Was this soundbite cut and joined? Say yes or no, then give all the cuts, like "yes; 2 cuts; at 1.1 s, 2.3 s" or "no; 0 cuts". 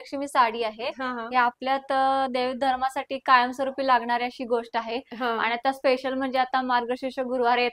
no; 0 cuts